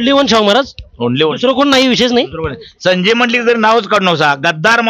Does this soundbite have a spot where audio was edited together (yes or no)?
no